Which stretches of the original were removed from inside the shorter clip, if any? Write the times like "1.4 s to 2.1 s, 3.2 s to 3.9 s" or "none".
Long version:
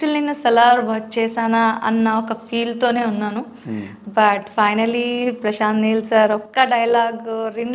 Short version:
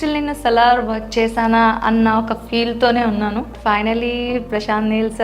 3.5 s to 4.5 s